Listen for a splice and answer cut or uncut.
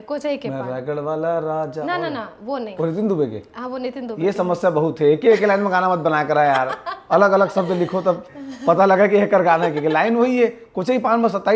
uncut